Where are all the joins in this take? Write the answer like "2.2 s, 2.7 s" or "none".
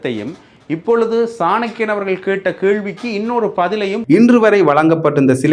4.0 s